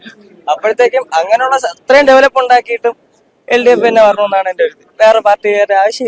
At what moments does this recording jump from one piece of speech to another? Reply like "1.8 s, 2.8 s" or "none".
none